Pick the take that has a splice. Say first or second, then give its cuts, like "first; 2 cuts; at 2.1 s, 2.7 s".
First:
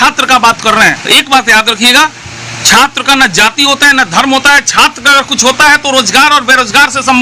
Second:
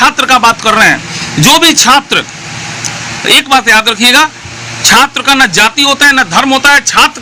first; 1 cut; at 1.0 s